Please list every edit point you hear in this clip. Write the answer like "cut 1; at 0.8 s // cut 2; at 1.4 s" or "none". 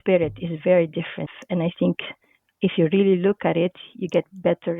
cut 1; at 1.2 s